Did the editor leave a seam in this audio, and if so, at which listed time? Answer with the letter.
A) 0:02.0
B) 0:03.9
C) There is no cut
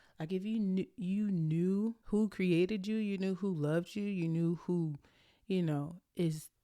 A